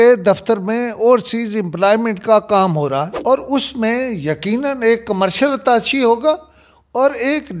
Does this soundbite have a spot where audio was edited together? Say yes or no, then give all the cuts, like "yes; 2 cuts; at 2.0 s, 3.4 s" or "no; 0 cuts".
yes; 1 cut; at 3.1 s